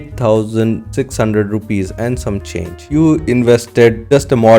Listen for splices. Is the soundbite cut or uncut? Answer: cut